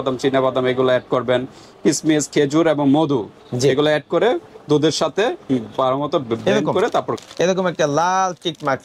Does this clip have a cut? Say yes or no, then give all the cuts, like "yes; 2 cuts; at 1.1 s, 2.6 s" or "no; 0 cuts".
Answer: yes; 1 cut; at 7.2 s